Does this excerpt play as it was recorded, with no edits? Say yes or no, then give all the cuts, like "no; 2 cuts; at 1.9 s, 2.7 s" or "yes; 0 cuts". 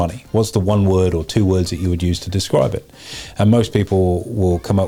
yes; 0 cuts